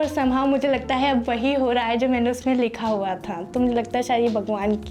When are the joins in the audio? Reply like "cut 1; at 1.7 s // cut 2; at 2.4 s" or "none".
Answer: none